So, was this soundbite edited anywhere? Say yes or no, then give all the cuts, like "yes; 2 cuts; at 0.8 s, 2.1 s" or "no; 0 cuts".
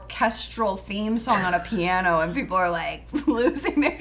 no; 0 cuts